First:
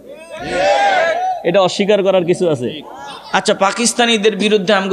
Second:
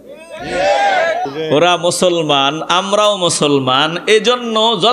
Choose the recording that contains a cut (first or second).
second